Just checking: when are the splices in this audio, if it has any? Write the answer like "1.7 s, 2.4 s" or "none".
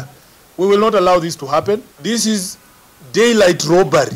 1.9 s